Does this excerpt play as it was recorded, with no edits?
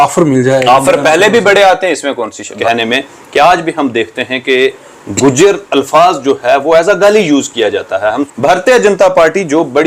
no; 2 cuts; at 2.6 s, 8.2 s

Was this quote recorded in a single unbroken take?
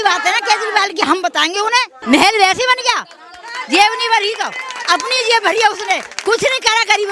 no; 1 cut; at 1.9 s

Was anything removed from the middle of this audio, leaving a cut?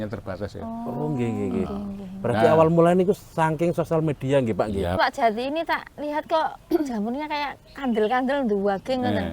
yes; 1 cut; at 5.0 s

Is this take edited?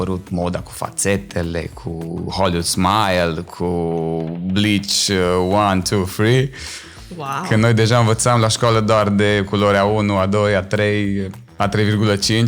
no; 0 cuts

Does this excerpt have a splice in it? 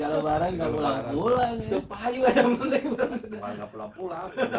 yes; 1 cut; at 3.4 s

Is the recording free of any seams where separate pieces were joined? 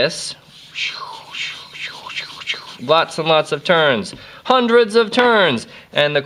yes; 0 cuts

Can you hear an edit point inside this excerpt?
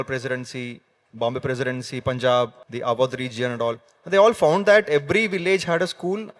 yes; 1 cut; at 2.6 s

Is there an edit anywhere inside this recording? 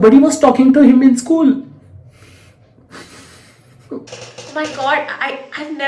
yes; 1 cut; at 4.1 s

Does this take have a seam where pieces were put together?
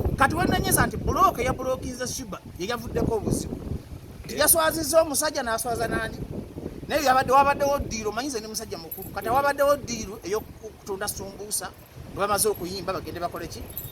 no; 0 cuts

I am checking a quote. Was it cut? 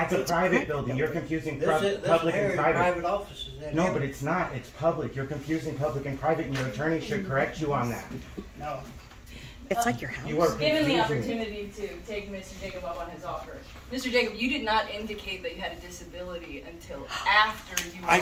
no; 0 cuts

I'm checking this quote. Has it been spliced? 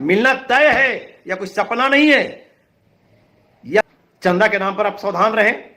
yes; 1 cut; at 3.8 s

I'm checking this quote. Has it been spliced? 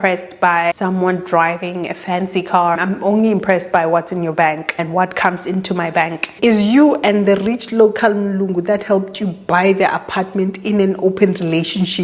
yes; 4 cuts; at 0.8 s, 2.8 s, 4.7 s, 6.3 s

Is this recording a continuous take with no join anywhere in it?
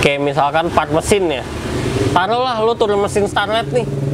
yes; 0 cuts

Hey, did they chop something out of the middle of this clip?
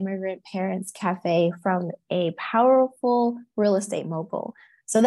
no; 0 cuts

